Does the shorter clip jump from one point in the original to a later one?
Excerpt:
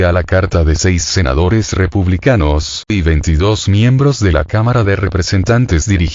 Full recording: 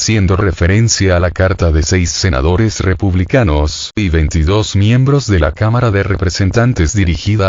no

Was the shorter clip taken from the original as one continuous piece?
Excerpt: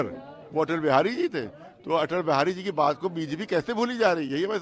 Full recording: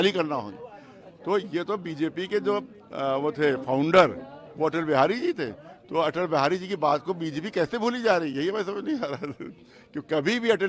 yes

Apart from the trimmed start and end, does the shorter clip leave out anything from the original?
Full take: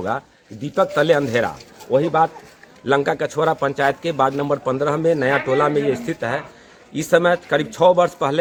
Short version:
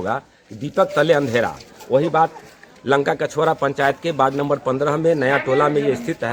no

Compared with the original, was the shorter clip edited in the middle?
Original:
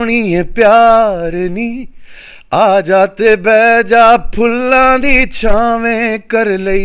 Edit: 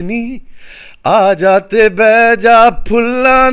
no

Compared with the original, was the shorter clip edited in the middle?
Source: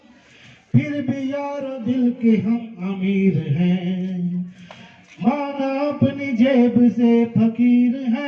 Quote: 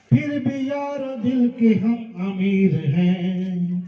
no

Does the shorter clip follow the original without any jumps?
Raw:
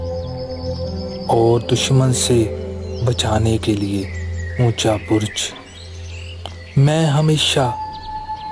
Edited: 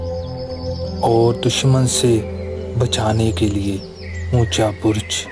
no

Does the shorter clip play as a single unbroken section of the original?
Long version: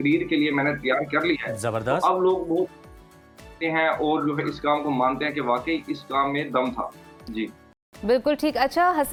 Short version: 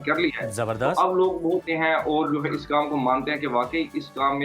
no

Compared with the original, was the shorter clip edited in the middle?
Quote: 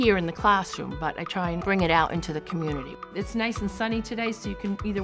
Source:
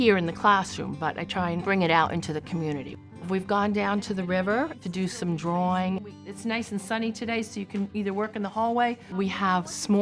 yes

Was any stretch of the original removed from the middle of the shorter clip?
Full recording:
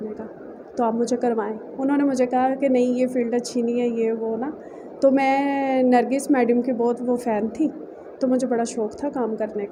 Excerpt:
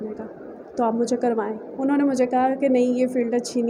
no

